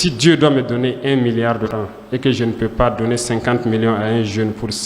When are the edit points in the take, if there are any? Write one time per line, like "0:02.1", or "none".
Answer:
0:01.7